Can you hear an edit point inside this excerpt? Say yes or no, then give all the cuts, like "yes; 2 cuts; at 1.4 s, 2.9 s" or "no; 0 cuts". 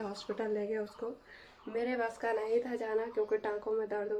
no; 0 cuts